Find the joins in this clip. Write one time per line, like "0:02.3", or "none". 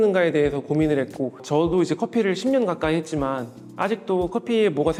none